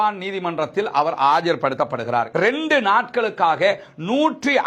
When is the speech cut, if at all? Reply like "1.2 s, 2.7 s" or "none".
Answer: 2.3 s